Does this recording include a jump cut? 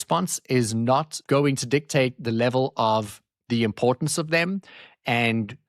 yes; 1 cut; at 1.1 s

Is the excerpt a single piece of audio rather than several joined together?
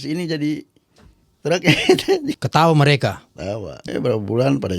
no; 2 cuts; at 2.4 s, 3.8 s

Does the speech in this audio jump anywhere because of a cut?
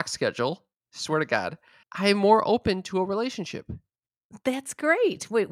yes; 1 cut; at 1.8 s

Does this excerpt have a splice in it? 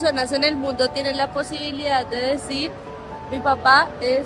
no; 0 cuts

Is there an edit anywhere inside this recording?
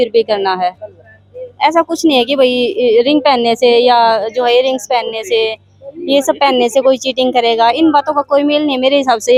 no; 0 cuts

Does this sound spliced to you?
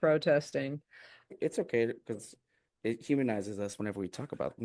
yes; 1 cut; at 1.3 s

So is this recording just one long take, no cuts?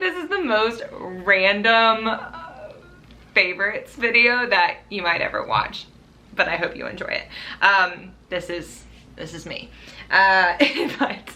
yes; 0 cuts

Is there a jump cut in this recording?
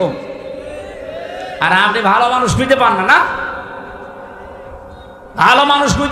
no; 0 cuts

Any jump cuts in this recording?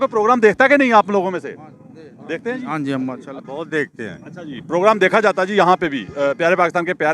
yes; 1 cut; at 3.3 s

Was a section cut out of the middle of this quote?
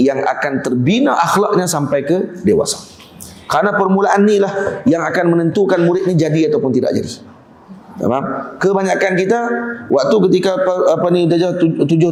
no; 0 cuts

